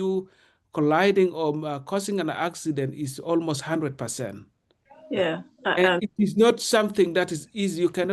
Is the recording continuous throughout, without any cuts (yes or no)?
yes